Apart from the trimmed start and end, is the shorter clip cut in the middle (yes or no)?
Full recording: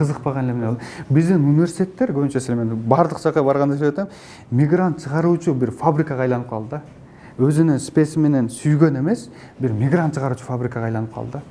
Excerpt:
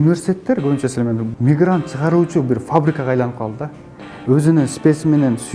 yes